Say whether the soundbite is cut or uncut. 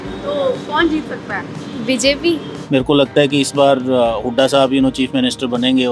cut